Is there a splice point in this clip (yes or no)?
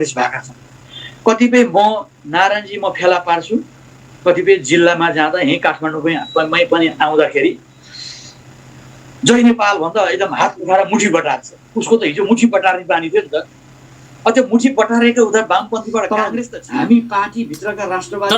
yes